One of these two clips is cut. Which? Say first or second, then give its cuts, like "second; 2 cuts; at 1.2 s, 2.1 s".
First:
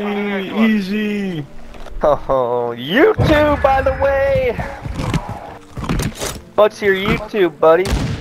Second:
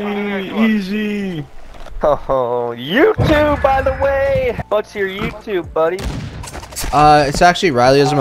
second; 1 cut; at 4.6 s